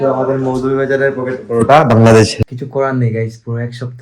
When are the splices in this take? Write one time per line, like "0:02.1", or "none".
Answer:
0:02.4